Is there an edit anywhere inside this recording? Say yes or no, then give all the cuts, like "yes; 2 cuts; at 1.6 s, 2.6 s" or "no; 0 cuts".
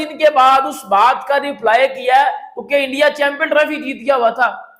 no; 0 cuts